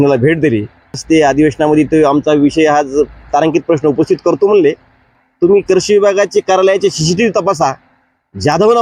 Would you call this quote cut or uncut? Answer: cut